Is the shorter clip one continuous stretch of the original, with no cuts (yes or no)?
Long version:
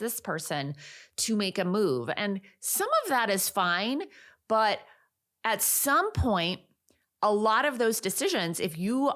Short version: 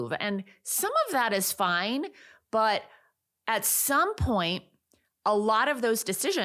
yes